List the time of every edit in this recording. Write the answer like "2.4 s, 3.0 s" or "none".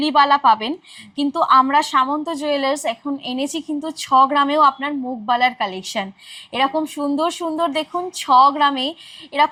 none